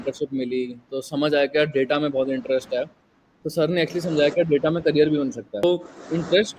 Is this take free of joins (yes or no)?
no